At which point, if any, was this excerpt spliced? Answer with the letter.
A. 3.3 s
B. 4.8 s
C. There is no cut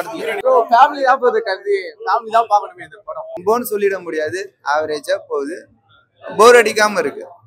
A